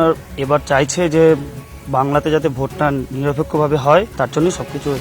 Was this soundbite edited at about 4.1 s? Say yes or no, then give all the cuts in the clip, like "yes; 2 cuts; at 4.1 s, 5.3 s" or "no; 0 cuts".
yes; 1 cut; at 4.1 s